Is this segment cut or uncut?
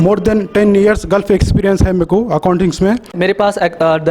cut